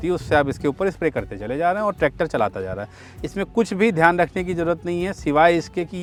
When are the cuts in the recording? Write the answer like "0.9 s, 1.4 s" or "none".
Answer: none